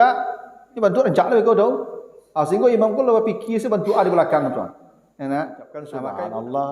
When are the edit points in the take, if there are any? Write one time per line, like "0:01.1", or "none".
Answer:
0:05.7